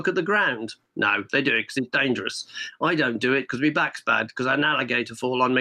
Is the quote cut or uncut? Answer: uncut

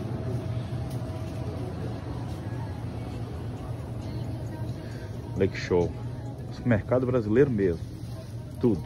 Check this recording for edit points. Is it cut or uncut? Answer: uncut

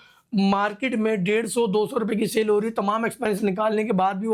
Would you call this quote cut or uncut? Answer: uncut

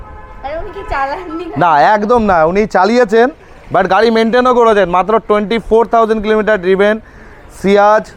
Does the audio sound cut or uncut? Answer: uncut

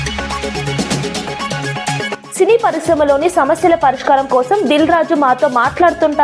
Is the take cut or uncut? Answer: cut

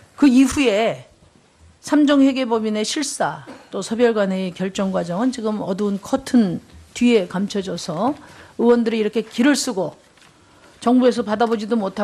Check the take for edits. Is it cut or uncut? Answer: uncut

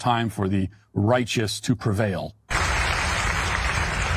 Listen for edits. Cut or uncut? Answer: cut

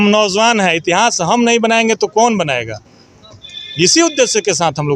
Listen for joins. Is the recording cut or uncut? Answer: uncut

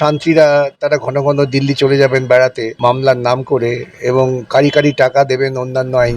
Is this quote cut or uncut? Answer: cut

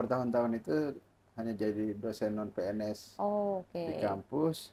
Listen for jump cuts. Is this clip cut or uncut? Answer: uncut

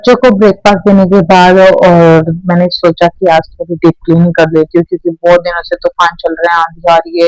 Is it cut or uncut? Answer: uncut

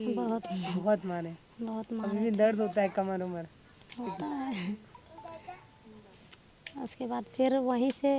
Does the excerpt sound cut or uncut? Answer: uncut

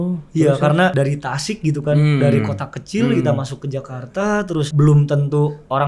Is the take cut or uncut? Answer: cut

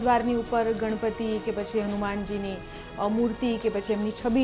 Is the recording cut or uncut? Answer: uncut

